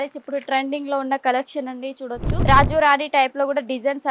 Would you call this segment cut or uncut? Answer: cut